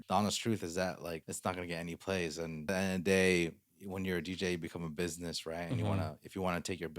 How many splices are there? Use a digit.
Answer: 2